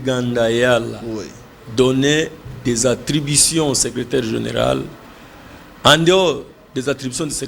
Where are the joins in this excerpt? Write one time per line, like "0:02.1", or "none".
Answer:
none